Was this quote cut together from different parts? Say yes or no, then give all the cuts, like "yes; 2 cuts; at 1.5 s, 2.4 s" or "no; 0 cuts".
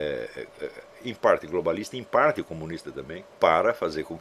yes; 1 cut; at 3.2 s